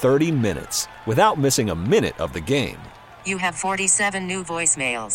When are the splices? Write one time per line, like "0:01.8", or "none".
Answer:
none

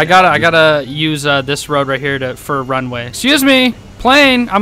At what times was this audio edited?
0:03.1

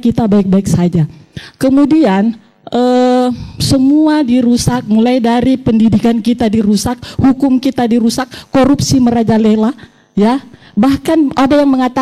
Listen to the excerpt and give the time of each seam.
none

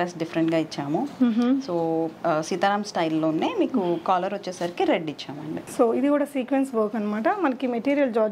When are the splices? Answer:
none

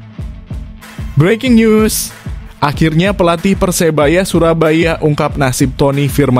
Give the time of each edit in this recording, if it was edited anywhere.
0:01.1

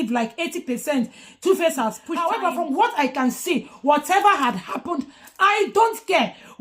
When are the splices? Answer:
0:02.1

